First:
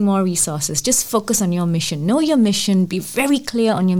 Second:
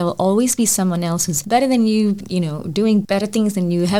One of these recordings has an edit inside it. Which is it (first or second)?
second